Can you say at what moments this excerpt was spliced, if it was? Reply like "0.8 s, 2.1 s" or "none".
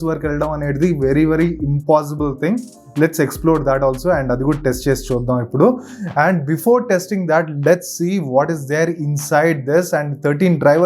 none

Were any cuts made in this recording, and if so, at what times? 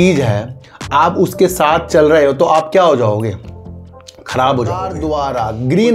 4.9 s

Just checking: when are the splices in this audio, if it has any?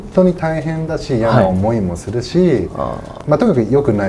none

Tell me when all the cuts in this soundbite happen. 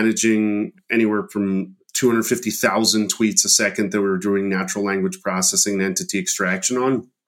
none

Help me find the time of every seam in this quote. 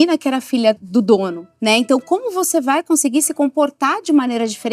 0.8 s, 1.4 s

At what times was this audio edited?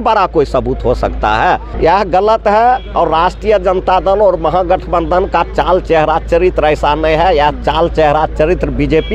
1.7 s

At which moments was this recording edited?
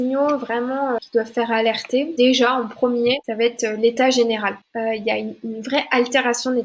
1.0 s, 2.1 s, 3.3 s, 4.6 s

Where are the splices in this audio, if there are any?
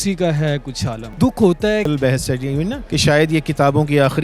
1.1 s, 1.9 s

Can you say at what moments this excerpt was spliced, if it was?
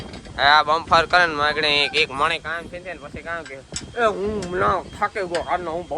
none

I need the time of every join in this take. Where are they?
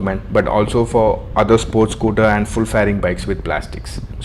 none

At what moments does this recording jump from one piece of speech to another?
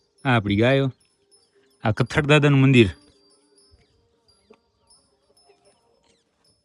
none

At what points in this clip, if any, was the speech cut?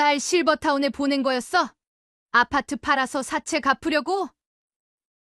none

